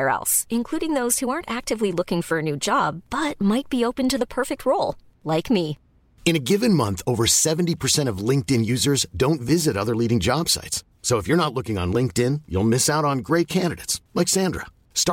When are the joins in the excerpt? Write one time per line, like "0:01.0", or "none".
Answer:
none